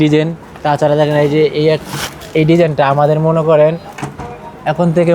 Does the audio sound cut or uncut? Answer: uncut